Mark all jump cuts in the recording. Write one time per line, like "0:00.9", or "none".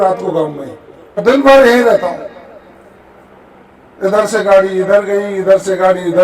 0:01.2